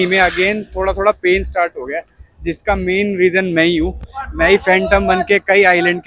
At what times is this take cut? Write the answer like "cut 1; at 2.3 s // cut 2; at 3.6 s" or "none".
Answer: none